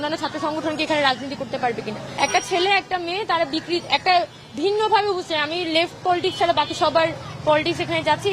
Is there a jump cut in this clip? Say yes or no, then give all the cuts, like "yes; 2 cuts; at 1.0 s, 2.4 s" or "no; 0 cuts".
yes; 1 cut; at 2.0 s